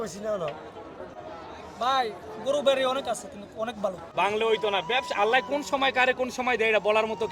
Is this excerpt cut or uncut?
cut